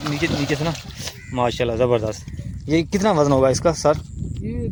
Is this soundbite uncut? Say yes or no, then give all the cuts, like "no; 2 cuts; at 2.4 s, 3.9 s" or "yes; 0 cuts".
yes; 0 cuts